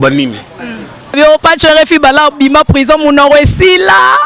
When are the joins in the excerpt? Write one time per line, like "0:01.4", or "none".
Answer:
0:01.1